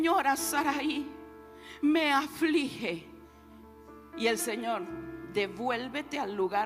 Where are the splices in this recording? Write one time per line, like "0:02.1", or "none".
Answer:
none